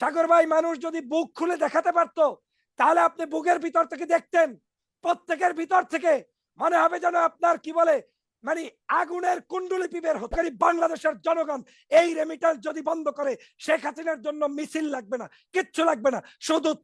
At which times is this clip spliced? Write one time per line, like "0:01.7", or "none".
0:10.3